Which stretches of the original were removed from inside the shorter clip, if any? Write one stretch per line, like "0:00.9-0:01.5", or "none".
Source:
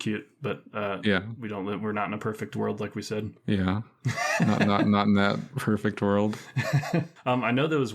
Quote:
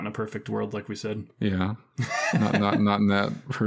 none